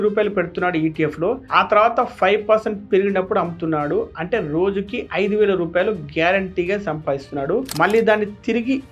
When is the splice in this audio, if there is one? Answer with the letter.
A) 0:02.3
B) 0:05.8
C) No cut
C